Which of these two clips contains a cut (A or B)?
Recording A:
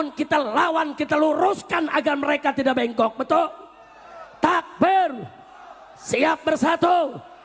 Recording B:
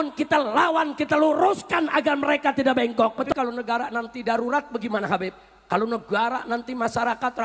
B